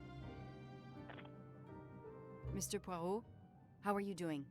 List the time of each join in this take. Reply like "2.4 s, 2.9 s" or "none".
2.5 s